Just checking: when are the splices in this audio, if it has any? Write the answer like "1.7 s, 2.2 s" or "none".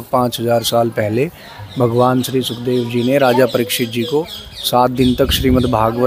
none